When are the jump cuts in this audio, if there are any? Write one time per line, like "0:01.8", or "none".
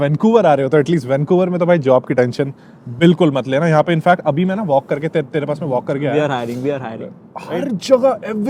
none